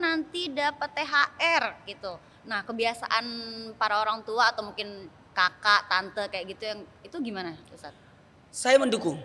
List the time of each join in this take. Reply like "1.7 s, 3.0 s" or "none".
none